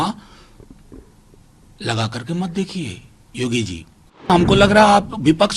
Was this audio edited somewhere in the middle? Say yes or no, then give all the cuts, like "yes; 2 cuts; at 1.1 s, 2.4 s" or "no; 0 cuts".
yes; 1 cut; at 4.3 s